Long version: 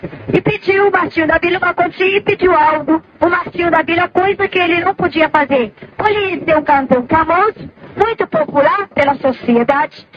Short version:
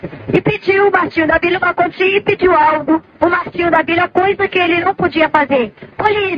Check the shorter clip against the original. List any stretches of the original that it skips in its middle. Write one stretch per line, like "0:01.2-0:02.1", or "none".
none